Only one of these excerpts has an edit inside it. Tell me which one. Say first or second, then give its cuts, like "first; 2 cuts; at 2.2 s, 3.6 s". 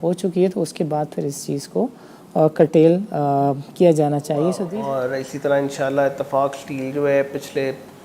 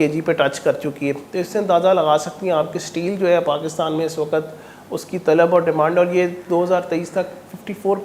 first; 1 cut; at 4.6 s